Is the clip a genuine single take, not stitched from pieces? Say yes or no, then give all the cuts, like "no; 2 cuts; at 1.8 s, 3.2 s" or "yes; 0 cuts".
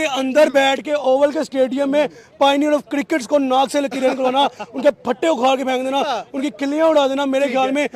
yes; 0 cuts